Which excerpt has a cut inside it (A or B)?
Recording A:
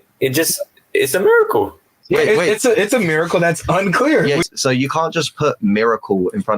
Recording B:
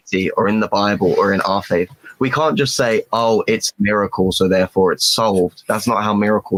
A